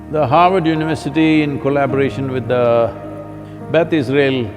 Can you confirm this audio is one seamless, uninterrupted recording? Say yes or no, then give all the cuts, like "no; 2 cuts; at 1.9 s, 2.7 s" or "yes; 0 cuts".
yes; 0 cuts